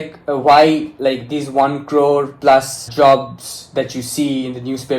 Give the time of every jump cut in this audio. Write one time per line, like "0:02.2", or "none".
0:02.9